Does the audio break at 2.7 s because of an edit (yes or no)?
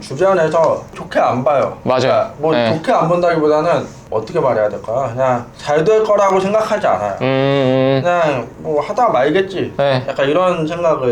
no